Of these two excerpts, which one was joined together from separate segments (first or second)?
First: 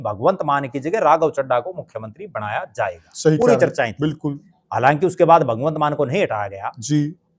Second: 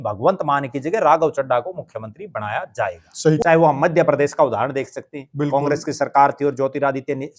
second